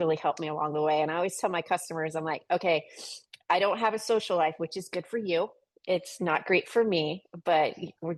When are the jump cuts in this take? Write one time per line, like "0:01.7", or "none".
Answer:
none

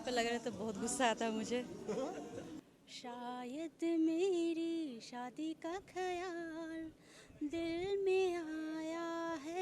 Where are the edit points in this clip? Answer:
0:02.6

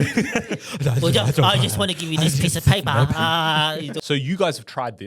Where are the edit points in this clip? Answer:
0:04.0

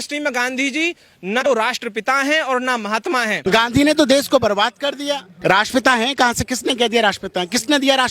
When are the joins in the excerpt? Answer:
0:01.5
0:03.4
0:05.3

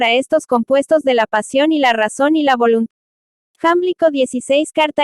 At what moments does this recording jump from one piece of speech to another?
0:02.9

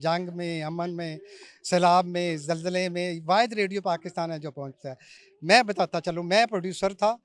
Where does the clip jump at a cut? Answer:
none

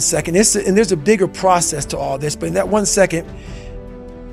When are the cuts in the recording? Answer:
none

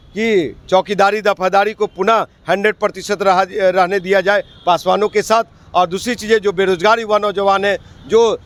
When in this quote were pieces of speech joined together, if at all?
none

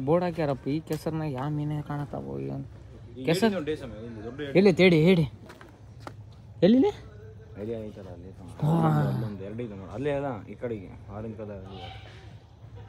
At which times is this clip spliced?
none

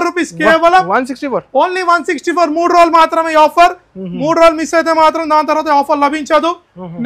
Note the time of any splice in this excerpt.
none

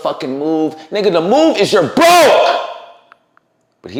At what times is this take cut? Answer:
none

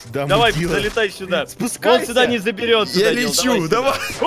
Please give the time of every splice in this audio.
none

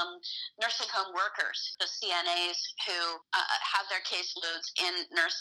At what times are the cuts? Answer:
0:01.7
0:03.2

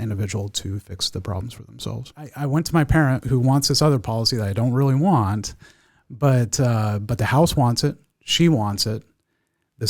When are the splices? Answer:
0:02.4

